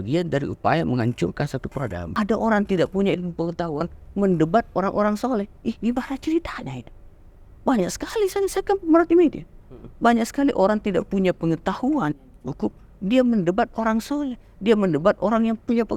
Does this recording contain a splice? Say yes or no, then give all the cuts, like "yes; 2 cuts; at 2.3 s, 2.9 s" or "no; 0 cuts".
yes; 1 cut; at 2.0 s